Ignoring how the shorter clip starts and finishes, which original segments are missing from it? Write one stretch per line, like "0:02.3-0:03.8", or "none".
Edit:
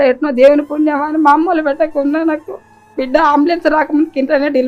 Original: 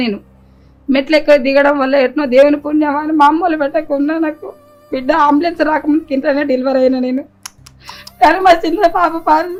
none